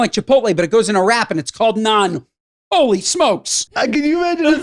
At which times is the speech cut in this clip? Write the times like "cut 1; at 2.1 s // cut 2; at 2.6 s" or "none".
cut 1; at 3.7 s